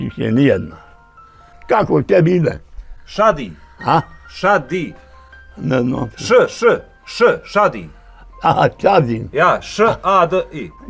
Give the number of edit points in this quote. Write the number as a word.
one